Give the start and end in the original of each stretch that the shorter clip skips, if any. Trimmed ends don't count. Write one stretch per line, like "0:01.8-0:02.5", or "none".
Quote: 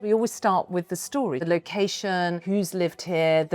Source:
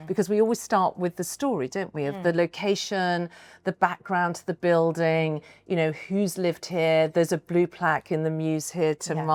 0:01.7-0:02.3
0:03.3-0:06.0